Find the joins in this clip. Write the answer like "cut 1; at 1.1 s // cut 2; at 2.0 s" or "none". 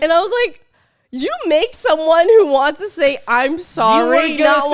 none

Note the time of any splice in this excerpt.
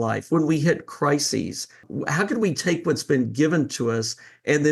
cut 1; at 1.8 s

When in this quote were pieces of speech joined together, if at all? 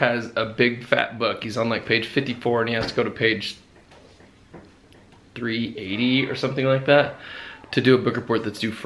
none

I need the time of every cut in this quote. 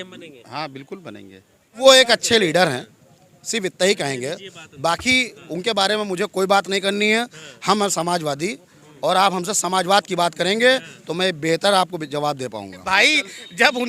cut 1; at 1.8 s // cut 2; at 12.8 s

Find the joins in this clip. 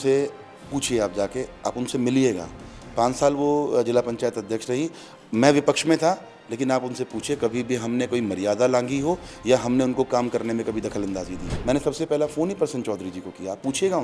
cut 1; at 11.5 s

